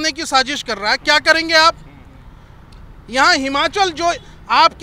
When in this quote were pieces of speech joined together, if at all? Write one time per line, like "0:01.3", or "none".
none